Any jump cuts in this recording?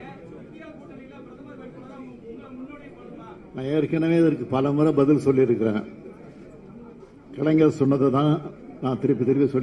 no; 0 cuts

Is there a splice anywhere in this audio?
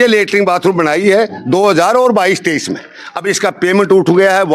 no; 0 cuts

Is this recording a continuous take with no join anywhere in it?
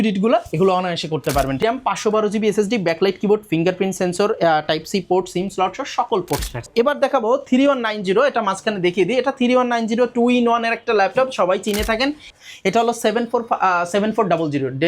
no; 3 cuts; at 1.6 s, 6.7 s, 12.3 s

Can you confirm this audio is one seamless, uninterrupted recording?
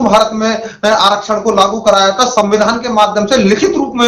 yes; 0 cuts

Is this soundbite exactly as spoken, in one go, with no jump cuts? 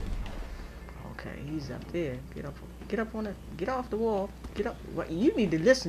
no; 1 cut; at 0.9 s

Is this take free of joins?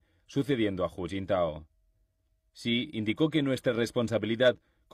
yes; 0 cuts

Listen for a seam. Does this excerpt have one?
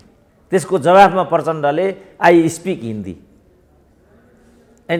no; 0 cuts

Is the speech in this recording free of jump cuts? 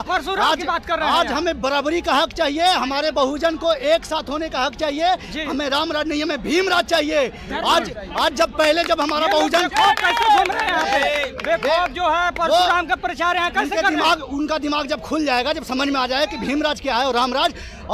yes; 0 cuts

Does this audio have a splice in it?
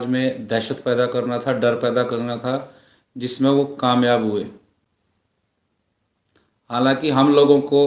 no; 0 cuts

